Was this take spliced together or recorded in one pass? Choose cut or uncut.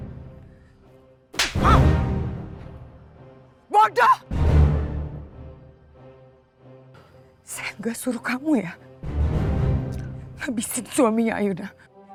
uncut